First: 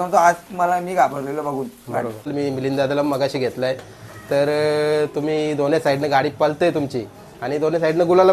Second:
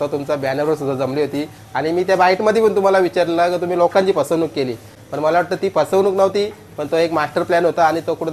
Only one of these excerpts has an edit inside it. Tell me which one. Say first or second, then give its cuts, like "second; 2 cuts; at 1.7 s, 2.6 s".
first; 1 cut; at 2.3 s